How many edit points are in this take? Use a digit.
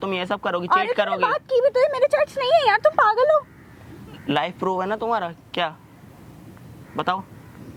0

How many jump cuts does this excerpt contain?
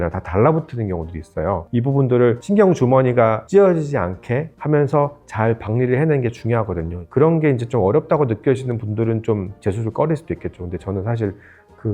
4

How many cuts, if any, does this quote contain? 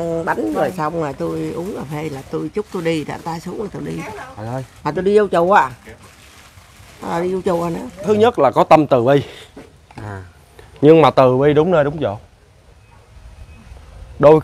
1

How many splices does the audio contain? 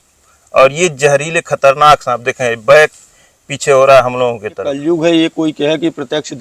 1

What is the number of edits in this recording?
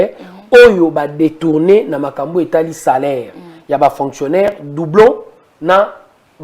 0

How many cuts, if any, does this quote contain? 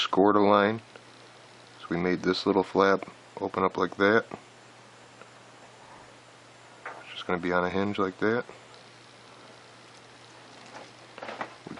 1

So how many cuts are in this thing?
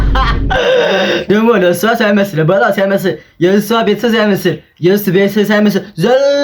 1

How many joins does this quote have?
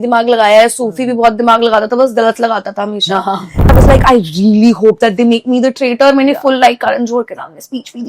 1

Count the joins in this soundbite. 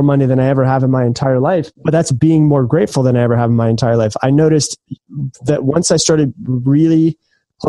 1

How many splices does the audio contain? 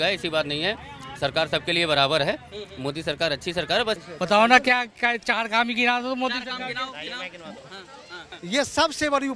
2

